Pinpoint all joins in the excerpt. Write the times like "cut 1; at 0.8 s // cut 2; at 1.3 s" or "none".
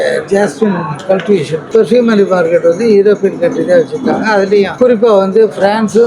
cut 1; at 1.6 s // cut 2; at 4.7 s